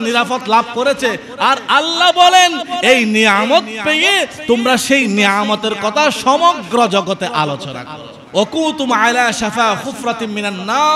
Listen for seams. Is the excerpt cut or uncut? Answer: cut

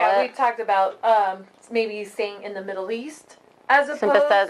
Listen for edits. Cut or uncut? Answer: uncut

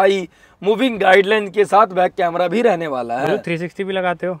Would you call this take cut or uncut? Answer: uncut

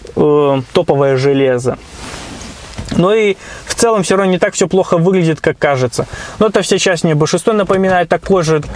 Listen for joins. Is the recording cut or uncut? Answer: uncut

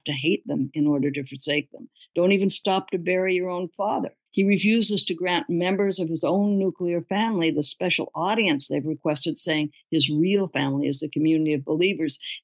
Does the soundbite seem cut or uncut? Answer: cut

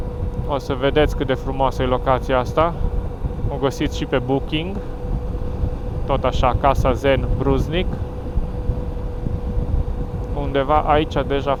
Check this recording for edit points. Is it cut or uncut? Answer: uncut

